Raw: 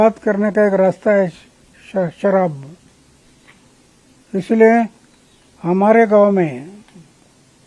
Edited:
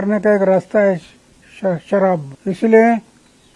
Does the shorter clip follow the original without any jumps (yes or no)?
no